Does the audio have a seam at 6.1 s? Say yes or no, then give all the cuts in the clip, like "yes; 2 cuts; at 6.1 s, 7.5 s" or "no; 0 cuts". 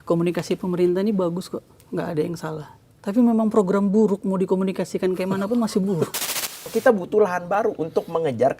yes; 1 cut; at 6.1 s